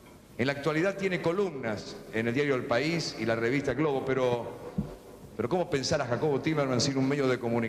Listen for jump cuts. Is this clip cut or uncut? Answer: uncut